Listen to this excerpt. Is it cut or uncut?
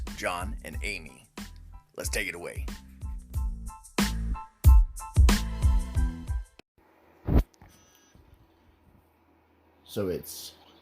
cut